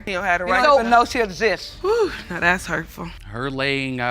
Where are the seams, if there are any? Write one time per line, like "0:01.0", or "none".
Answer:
0:03.1